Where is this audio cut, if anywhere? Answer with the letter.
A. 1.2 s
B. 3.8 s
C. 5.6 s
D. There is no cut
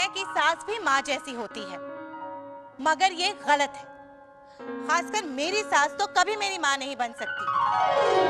D